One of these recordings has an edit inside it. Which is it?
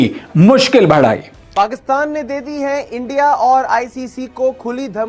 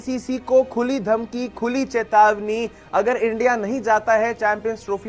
first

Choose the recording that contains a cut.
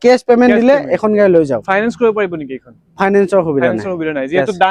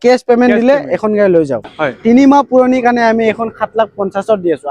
second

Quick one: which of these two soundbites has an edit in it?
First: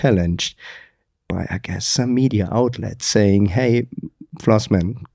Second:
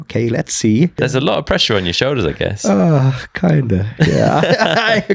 second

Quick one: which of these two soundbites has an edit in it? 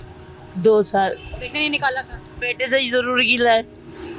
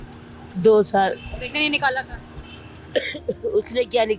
first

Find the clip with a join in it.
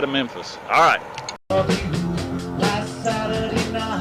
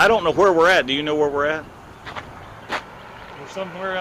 first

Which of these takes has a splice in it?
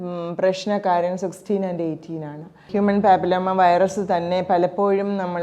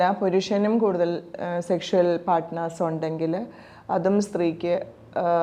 first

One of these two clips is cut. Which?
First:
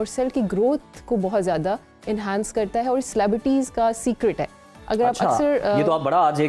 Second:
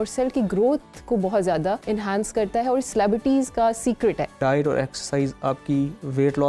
second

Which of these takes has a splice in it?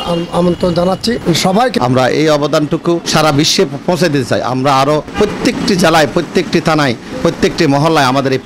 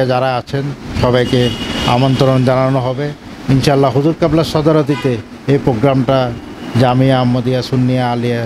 first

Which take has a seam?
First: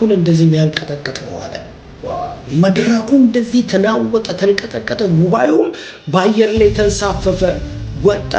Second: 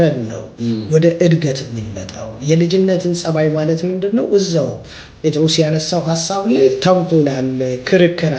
second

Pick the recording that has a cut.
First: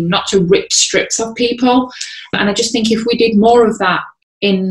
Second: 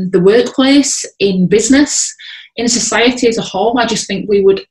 first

